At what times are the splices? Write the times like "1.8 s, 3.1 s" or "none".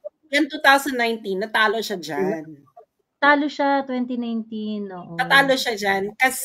none